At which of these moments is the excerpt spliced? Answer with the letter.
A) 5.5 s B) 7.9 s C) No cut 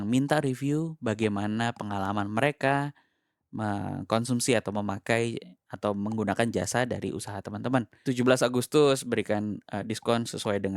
B